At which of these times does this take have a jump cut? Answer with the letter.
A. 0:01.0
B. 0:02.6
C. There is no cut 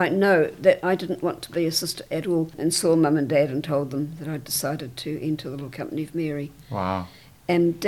B